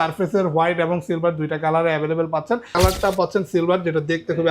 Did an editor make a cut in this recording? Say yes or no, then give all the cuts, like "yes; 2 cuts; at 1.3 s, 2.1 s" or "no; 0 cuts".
yes; 1 cut; at 2.7 s